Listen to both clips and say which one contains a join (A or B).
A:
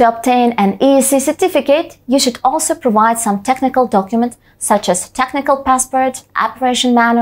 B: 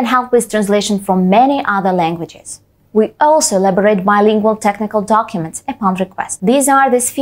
B